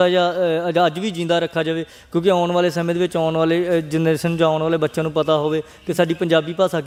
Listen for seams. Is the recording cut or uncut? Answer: uncut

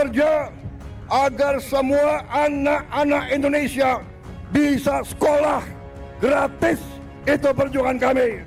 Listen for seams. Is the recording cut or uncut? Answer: uncut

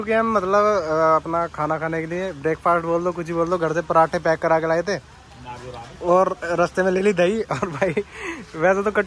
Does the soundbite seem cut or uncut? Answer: uncut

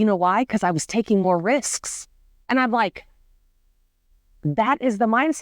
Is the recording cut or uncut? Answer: uncut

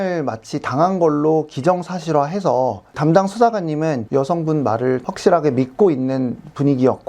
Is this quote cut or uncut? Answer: cut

